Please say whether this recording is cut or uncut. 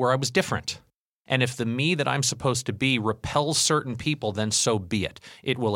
cut